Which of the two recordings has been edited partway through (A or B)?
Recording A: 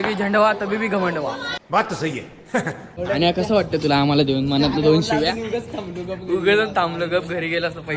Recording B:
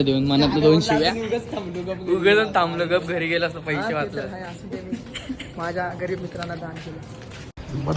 A